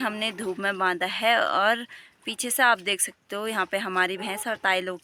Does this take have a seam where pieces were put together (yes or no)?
no